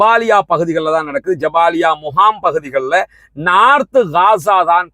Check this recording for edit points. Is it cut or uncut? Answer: uncut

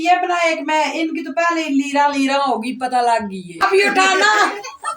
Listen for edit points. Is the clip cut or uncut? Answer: cut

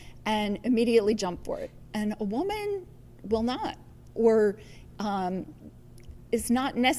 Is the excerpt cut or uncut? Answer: uncut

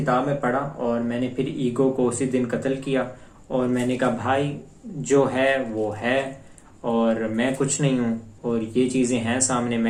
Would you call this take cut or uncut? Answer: uncut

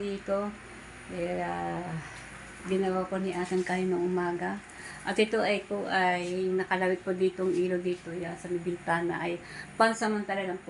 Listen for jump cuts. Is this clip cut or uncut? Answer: uncut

